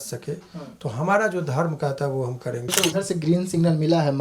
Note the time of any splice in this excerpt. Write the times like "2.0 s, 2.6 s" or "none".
2.7 s